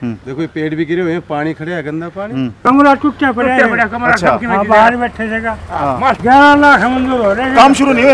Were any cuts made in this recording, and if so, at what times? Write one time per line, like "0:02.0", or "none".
0:02.6
0:06.2